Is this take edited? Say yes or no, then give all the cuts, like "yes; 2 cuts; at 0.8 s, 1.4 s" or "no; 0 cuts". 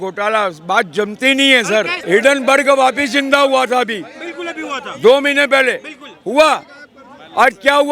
yes; 1 cut; at 2.0 s